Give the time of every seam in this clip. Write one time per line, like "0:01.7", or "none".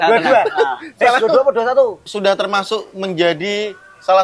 0:02.0